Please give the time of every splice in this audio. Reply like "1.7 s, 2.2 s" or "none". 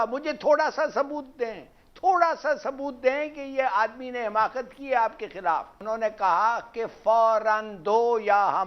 5.7 s